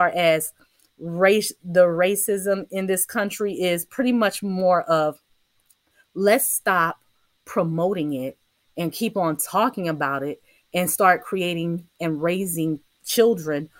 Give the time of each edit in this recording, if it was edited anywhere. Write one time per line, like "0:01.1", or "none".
none